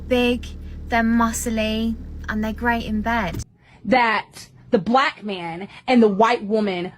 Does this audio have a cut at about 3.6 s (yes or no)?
yes